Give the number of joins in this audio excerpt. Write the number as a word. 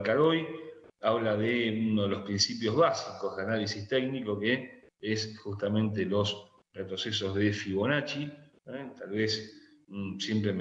one